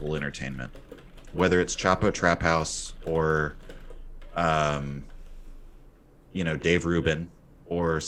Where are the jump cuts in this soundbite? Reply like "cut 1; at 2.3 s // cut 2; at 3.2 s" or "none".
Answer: none